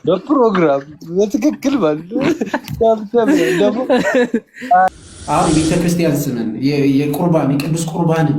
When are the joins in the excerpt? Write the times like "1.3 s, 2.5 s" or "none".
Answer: 4.9 s

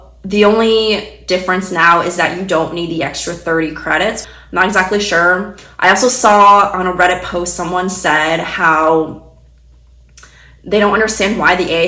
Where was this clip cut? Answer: 4.2 s

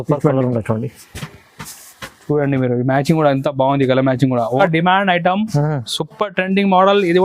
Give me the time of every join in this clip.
4.5 s

